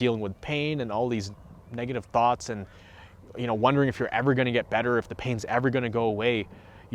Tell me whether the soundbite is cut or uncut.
uncut